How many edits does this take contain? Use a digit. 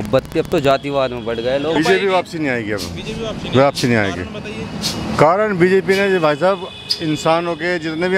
1